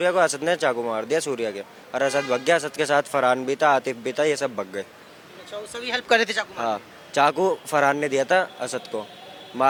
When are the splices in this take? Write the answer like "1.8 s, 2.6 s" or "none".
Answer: none